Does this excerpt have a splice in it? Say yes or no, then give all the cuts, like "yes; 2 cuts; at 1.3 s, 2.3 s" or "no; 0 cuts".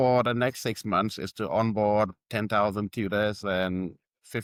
no; 0 cuts